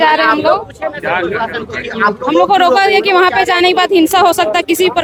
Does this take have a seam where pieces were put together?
no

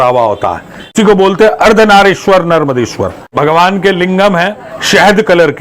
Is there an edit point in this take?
yes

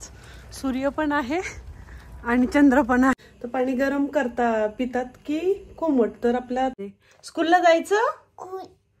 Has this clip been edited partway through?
yes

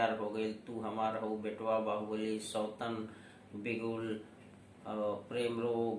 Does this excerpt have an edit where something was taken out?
no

